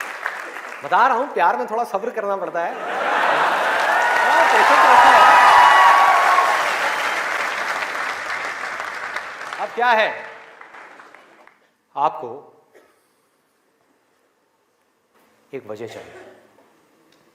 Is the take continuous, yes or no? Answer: no